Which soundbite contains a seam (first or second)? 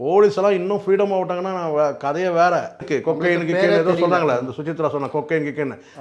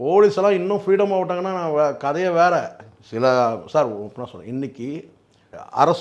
first